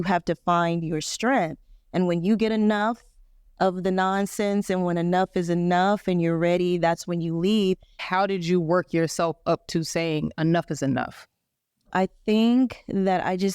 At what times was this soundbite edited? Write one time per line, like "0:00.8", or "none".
0:07.9
0:11.9